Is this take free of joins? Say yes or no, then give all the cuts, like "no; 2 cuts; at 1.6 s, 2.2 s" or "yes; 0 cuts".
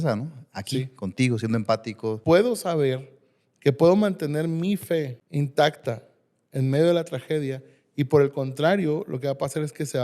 no; 2 cuts; at 2.2 s, 5.2 s